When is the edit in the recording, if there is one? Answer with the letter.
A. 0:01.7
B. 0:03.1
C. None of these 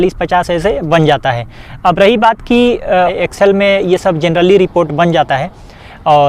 B